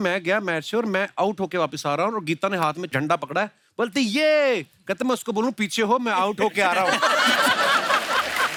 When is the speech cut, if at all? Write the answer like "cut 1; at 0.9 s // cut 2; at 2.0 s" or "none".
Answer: none

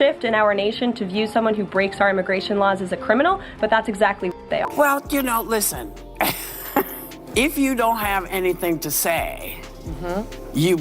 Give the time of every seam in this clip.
cut 1; at 4.7 s

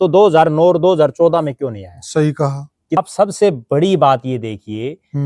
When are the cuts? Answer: cut 1; at 3.0 s

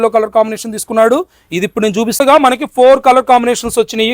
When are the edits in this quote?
cut 1; at 2.2 s

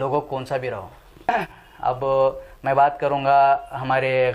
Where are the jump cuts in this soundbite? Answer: cut 1; at 1.0 s

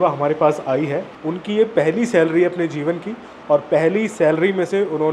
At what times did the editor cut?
cut 1; at 1.2 s

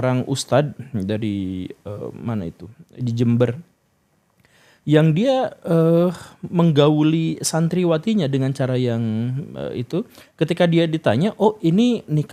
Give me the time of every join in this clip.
none

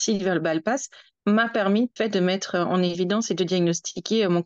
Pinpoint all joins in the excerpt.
cut 1; at 1.9 s

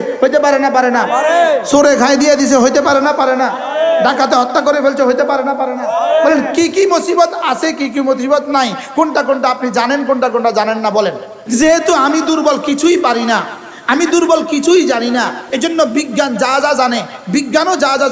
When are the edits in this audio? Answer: cut 1; at 11.3 s // cut 2; at 15.4 s

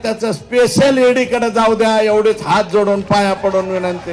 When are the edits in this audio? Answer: none

